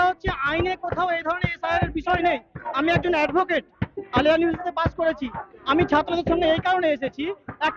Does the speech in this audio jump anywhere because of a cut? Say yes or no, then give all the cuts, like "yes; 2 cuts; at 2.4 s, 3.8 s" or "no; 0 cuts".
no; 0 cuts